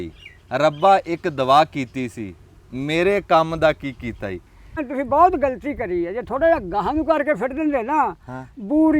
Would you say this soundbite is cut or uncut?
cut